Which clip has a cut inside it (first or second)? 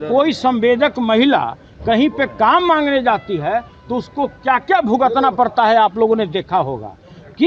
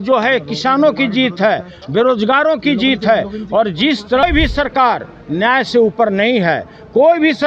second